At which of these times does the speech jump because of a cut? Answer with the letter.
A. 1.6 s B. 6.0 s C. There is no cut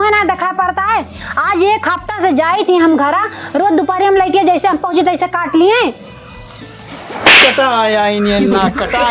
B